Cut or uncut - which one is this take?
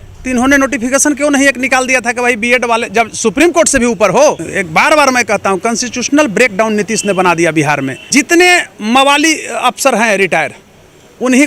cut